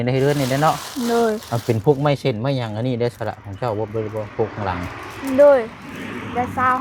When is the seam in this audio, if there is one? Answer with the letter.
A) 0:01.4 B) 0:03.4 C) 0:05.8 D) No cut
A